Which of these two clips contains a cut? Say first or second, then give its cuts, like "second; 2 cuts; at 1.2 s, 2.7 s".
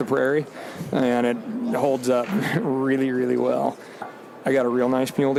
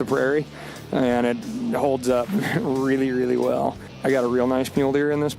second; 1 cut; at 3.9 s